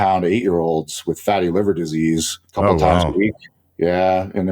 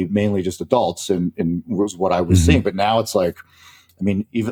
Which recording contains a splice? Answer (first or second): first